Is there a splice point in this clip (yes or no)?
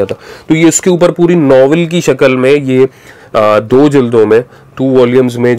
no